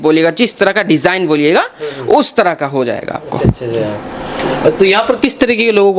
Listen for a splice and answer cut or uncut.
uncut